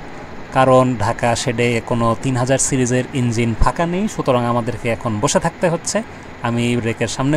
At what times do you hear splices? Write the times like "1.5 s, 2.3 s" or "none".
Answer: none